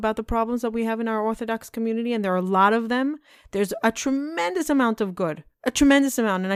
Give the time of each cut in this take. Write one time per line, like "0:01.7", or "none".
none